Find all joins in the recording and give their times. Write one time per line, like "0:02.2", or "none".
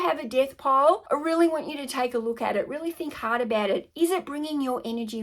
0:01.0